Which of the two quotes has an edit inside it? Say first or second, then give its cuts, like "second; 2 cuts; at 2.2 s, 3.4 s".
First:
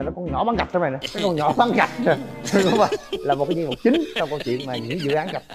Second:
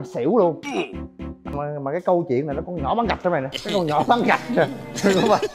second; 1 cut; at 1.6 s